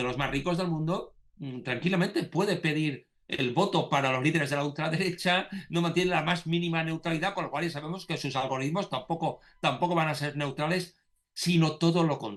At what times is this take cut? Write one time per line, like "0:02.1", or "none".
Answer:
none